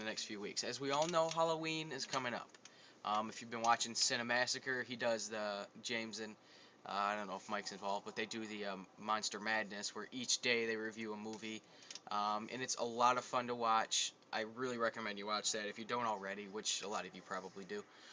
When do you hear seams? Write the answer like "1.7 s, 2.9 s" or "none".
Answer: 13.4 s